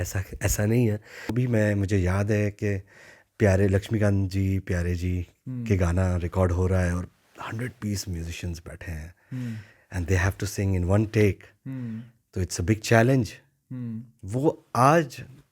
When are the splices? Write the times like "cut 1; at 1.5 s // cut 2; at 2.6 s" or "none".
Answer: cut 1; at 1.3 s